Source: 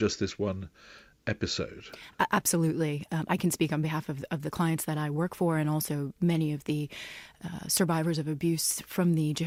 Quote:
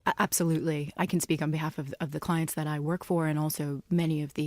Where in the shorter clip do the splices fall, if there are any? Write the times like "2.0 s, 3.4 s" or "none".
0.9 s